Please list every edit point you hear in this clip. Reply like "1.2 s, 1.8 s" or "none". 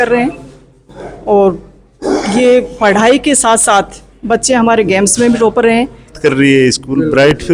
6.1 s